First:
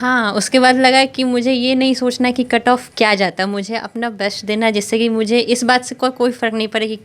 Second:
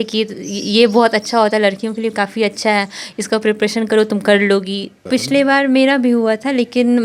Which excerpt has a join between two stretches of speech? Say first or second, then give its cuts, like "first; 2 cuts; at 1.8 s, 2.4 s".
second; 1 cut; at 5.0 s